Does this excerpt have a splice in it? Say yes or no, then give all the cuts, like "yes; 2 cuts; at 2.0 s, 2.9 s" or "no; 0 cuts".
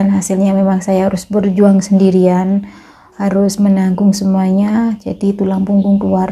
no; 0 cuts